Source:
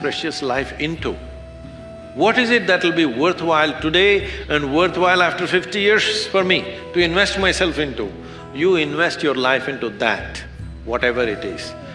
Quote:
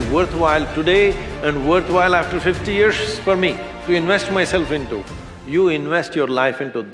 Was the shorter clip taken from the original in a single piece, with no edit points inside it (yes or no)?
yes